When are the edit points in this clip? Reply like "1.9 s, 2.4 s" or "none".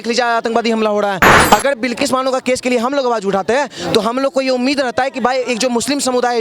1.3 s